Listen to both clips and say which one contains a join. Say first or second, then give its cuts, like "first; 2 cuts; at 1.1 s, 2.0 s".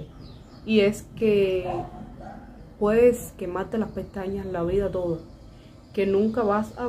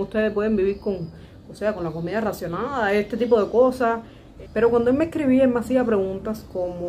second; 1 cut; at 4.4 s